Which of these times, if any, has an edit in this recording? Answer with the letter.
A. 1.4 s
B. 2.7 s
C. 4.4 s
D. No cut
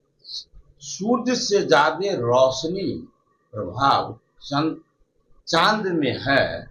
D